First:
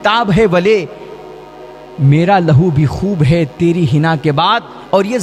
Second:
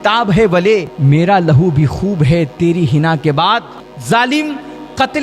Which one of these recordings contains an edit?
second; 2 cuts; at 0.9 s, 3.7 s

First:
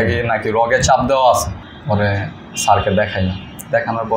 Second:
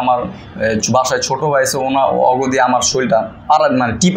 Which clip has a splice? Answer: first; 1 cut; at 1.6 s

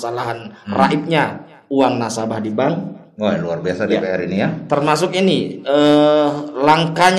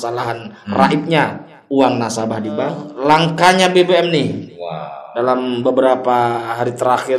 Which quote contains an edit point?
second; 1 cut; at 2.9 s

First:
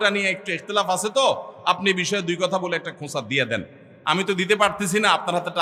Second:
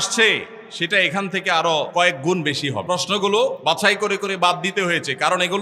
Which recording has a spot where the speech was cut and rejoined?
second; 3 cuts; at 1.9 s, 2.8 s, 3.6 s

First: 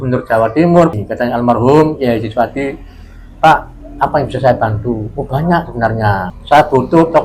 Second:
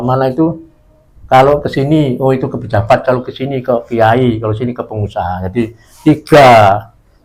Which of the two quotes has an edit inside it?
first; 2 cuts; at 0.9 s, 6.3 s

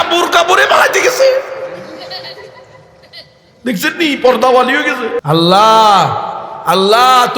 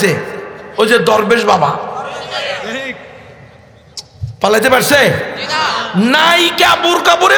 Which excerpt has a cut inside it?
first; 1 cut; at 5.2 s

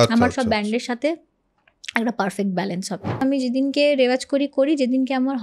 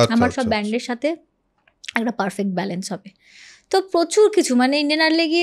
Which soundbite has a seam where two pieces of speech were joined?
first; 1 cut; at 3.2 s

